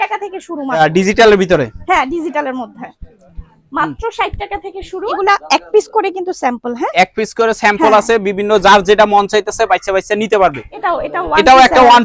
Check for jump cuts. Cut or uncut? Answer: cut